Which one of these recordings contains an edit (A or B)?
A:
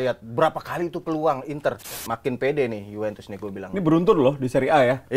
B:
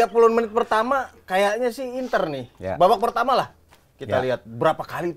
A